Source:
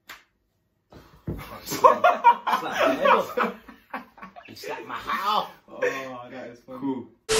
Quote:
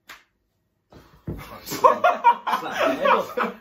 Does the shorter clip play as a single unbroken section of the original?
yes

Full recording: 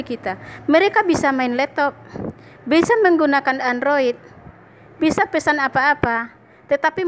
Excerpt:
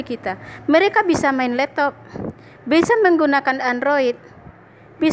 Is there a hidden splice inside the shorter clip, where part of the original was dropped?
no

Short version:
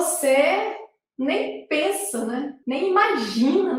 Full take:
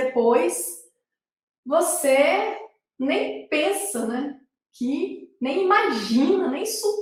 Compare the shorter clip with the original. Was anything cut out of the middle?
yes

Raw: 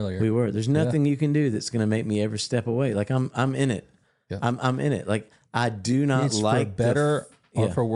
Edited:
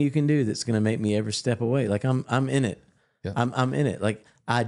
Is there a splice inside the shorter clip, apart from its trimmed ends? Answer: no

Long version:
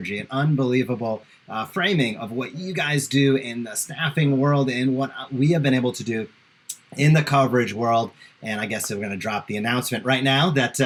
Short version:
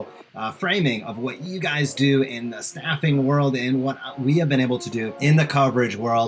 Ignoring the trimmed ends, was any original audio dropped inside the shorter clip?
yes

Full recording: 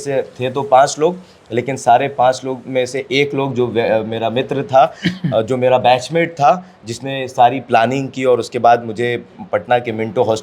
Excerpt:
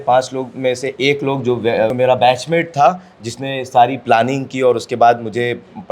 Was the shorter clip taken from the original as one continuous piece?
no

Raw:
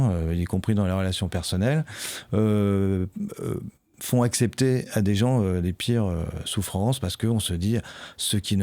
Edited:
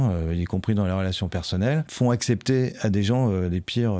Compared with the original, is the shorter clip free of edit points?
no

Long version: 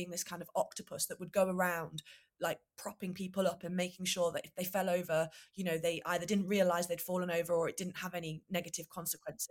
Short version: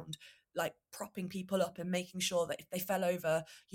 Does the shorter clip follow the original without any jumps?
yes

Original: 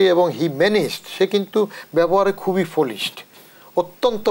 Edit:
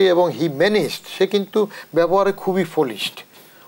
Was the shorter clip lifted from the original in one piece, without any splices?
yes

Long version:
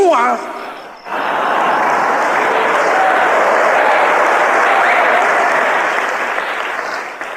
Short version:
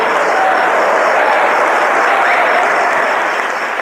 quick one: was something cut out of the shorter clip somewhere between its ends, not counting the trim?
no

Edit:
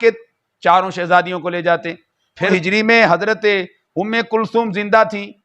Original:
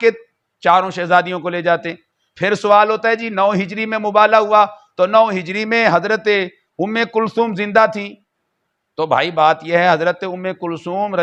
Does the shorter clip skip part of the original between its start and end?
yes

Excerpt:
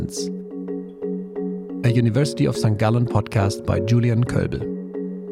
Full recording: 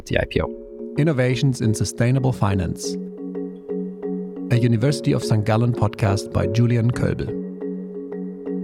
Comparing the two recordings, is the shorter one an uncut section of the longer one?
yes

